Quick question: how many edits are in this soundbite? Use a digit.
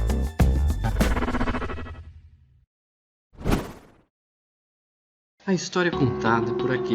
1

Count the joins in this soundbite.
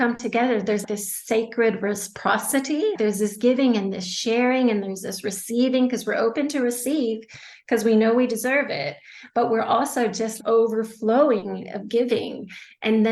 3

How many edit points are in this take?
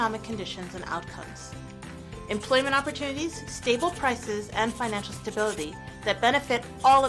0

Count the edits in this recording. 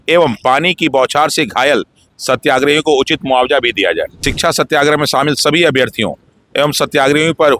1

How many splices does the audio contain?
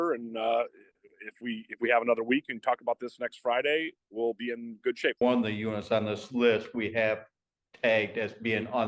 1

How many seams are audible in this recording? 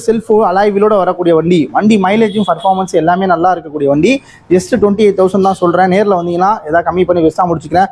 0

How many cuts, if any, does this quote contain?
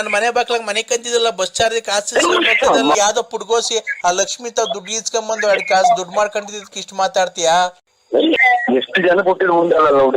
2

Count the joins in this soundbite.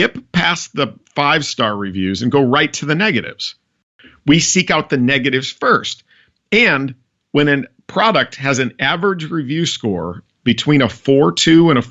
1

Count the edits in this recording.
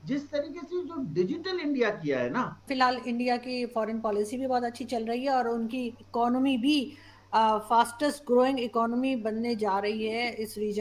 1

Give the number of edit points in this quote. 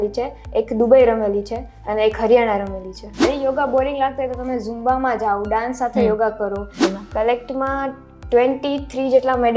2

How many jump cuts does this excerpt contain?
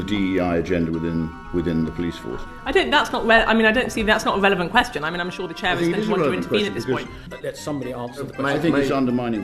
2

